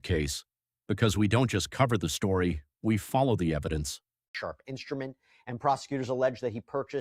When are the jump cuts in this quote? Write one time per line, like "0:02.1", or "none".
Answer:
0:04.3